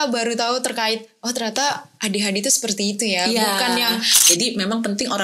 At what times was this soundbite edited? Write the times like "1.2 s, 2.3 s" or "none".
4.3 s